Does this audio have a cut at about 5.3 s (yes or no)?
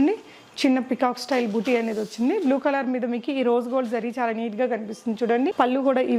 no